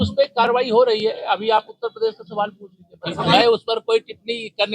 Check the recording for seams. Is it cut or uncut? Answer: cut